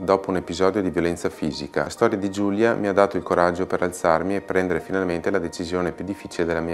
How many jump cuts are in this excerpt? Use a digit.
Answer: 1